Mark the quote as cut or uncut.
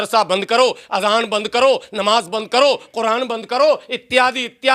uncut